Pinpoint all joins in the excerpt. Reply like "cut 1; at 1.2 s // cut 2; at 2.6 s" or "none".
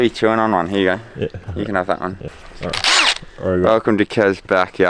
cut 1; at 2.3 s